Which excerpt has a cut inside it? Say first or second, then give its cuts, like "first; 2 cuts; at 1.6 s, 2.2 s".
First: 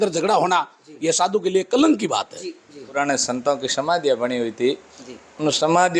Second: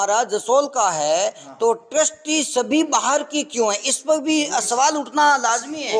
first; 1 cut; at 3.0 s